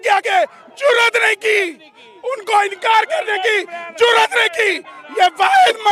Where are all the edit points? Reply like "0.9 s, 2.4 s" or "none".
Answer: none